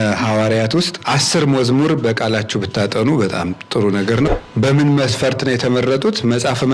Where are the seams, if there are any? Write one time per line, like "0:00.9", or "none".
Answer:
0:01.0
0:04.3